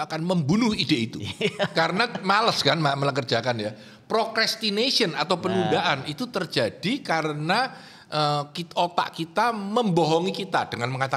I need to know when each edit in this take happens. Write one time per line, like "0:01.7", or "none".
none